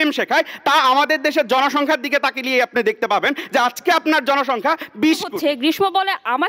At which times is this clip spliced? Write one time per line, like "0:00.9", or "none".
0:05.3